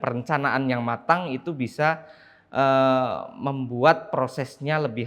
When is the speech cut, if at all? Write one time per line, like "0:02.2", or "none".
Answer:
none